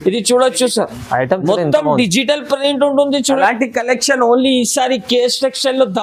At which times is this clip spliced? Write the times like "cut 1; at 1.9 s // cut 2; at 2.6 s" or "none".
cut 1; at 3.4 s